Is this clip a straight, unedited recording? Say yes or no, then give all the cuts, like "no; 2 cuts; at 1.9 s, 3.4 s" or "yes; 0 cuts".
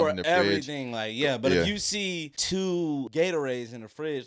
no; 2 cuts; at 2.3 s, 3.1 s